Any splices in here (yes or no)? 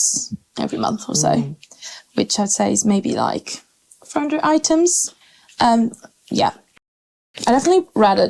no